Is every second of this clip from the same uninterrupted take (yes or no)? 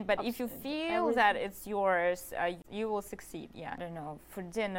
no